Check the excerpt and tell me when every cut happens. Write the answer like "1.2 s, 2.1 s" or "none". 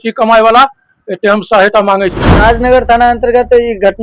2.4 s